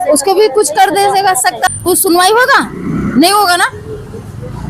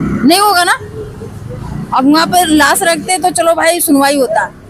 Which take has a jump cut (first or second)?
first